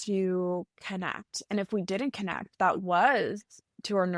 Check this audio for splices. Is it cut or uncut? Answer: uncut